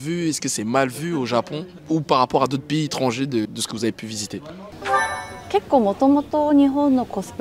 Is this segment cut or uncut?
uncut